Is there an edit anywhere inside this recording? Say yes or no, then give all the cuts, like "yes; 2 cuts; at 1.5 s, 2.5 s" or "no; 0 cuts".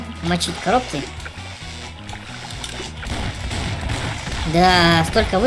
yes; 1 cut; at 4.5 s